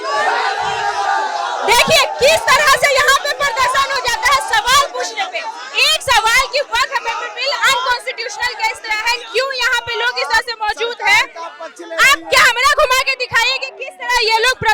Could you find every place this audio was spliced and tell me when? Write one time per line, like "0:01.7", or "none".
none